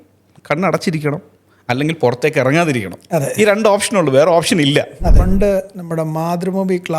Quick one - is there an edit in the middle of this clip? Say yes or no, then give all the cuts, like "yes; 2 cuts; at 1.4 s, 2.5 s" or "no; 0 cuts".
yes; 1 cut; at 5.2 s